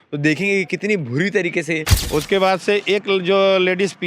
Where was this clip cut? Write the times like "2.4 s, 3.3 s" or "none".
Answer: 1.9 s

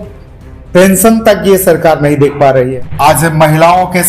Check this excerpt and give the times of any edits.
2.7 s

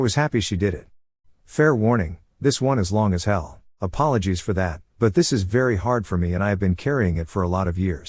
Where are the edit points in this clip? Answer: 1.1 s

